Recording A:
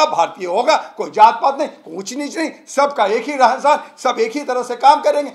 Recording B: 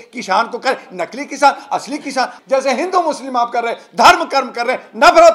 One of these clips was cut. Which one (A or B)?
B